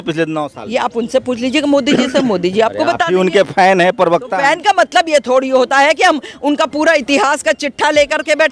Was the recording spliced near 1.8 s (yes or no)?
no